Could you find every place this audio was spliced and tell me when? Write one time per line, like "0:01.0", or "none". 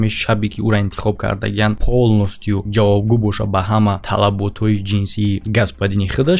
none